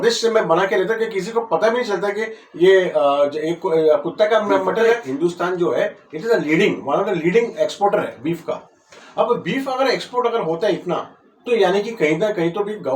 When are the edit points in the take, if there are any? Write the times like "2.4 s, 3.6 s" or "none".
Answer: 4.9 s